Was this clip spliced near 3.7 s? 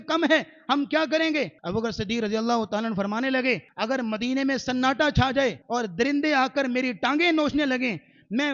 yes; 3 cuts; at 1.6 s, 3.7 s, 5.6 s

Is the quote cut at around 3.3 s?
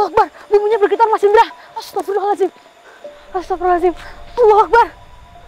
no; 0 cuts

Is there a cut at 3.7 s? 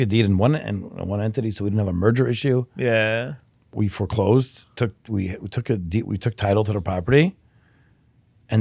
yes; 1 cut; at 3.7 s

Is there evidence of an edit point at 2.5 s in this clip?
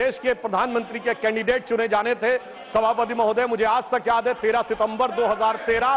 no; 0 cuts

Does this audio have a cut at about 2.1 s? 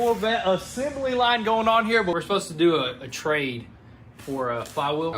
yes; 1 cut; at 2.1 s

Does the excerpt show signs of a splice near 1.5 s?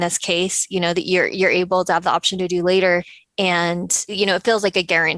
no; 2 cuts; at 3.2 s, 4.1 s

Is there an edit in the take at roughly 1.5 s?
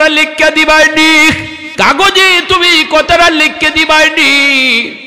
yes; 1 cut; at 1.5 s

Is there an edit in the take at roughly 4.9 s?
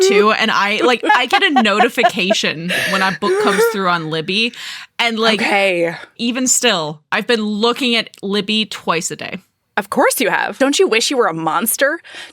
no; 2 cuts; at 1.1 s, 6.1 s

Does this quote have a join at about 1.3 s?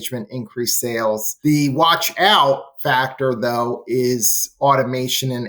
yes; 1 cut; at 1.3 s

